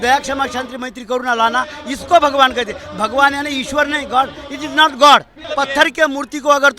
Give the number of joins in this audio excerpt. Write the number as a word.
one